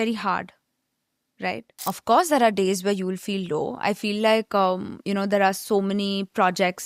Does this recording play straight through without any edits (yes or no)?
no